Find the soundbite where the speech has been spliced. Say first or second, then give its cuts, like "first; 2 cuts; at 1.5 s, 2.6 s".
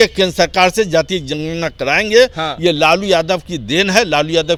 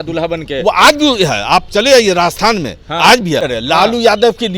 second; 1 cut; at 3.5 s